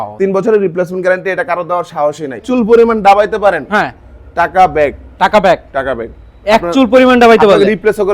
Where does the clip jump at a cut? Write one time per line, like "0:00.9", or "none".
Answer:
0:02.4